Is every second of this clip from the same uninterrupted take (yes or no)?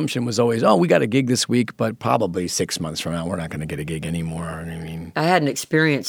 no